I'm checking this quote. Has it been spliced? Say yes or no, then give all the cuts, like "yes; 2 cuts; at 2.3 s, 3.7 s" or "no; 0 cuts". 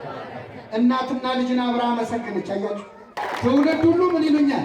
yes; 1 cut; at 3.2 s